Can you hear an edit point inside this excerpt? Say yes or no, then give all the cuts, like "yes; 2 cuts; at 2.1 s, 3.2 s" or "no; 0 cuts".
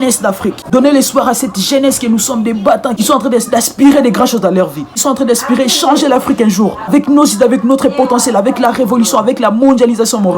yes; 2 cuts; at 2.9 s, 6.9 s